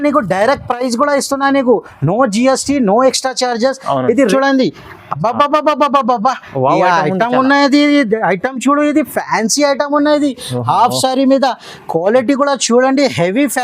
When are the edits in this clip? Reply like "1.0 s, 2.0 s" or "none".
4.3 s